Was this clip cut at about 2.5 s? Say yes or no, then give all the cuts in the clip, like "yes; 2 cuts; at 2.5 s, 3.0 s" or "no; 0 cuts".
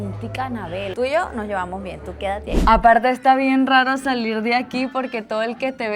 yes; 2 cuts; at 0.9 s, 2.5 s